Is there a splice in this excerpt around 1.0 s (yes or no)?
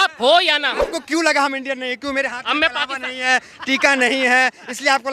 yes